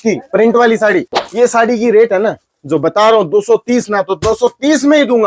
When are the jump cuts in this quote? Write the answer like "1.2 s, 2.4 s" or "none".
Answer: 1.2 s